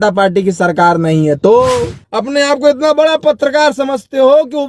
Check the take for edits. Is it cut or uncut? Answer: cut